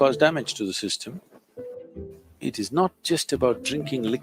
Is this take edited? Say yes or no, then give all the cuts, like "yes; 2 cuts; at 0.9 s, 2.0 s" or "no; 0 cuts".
yes; 1 cut; at 1.8 s